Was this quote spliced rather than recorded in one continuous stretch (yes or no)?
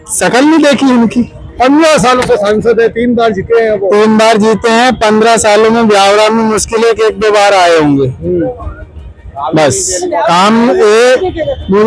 no